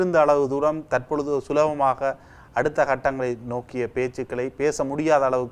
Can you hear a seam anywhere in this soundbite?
no; 0 cuts

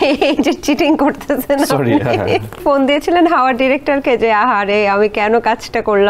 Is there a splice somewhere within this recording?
yes; 1 cut; at 2.6 s

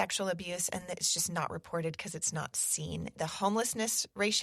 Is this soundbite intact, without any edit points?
no; 1 cut; at 3.2 s

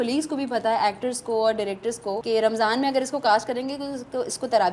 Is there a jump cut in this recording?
yes; 1 cut; at 2.2 s

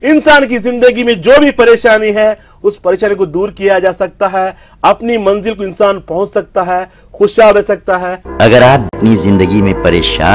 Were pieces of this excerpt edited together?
yes; 2 cuts; at 8.1 s, 8.9 s

